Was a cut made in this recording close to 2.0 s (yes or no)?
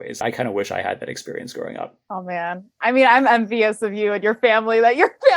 yes